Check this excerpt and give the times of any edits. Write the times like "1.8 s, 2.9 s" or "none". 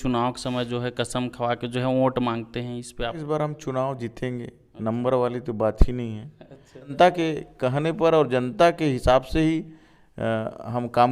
3.2 s, 6.9 s